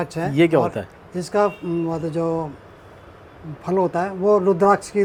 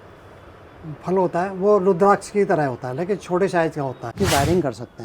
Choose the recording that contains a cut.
second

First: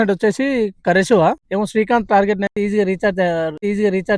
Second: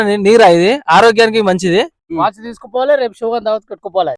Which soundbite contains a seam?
second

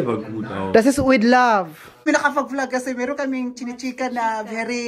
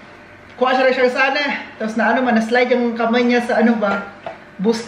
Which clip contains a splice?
first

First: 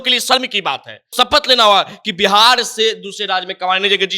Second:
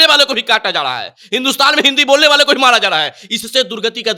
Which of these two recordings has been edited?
first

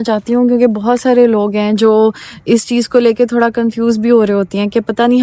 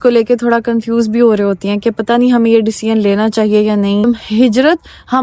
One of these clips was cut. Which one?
second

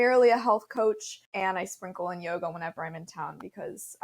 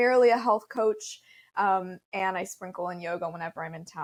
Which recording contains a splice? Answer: first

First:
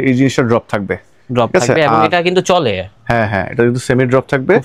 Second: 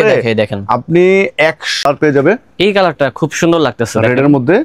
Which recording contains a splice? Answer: second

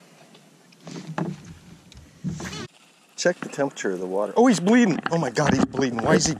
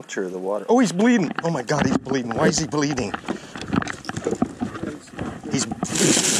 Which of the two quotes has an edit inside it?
first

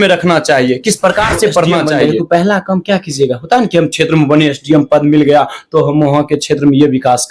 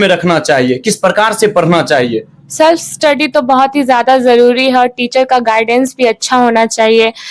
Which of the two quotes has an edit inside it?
first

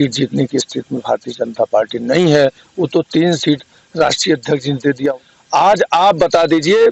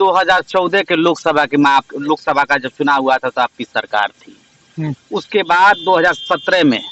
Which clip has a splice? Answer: first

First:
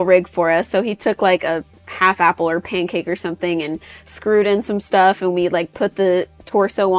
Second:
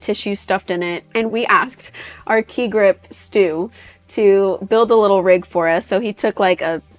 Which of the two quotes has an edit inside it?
second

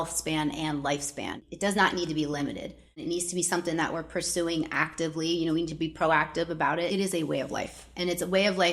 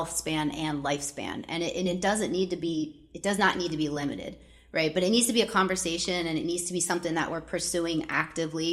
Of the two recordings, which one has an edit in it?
first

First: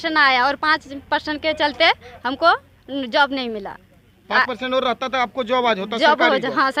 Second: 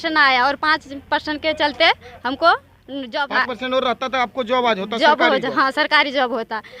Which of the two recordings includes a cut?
second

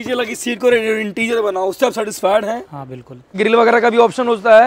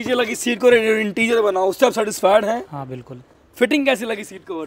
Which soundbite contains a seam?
first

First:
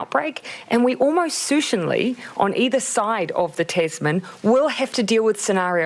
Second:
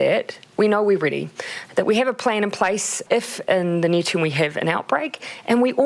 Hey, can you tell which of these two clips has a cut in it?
second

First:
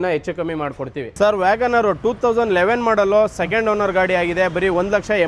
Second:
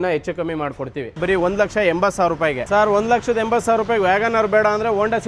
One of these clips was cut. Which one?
second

